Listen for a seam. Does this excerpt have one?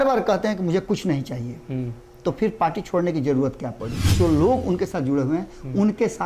yes; 1 cut; at 4.1 s

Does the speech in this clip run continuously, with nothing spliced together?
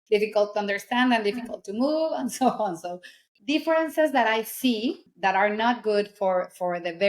no; 2 cuts; at 3.3 s, 5.1 s

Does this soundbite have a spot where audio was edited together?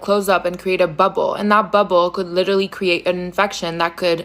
no; 0 cuts

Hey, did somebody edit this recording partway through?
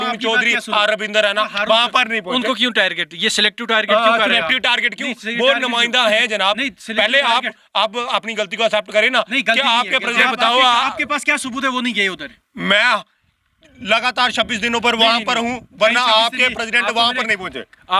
no; 0 cuts

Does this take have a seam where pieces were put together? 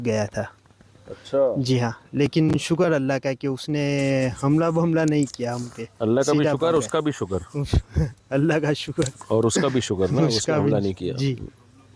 no; 0 cuts

